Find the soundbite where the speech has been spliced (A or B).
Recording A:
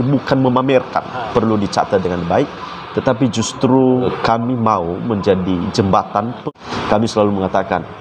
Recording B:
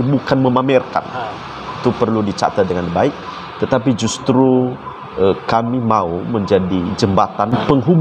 A